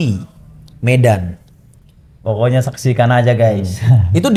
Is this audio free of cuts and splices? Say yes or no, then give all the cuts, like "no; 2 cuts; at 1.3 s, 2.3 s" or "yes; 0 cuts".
yes; 0 cuts